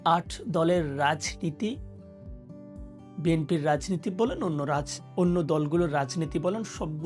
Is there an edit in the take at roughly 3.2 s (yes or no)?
yes